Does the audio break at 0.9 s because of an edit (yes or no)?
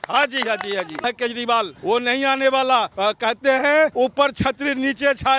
yes